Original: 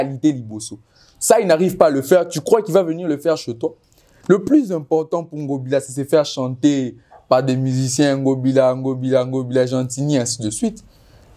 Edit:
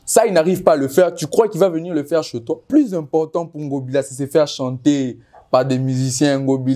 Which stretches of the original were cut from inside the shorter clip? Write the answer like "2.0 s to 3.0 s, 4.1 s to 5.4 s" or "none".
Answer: 3.8 s to 4.4 s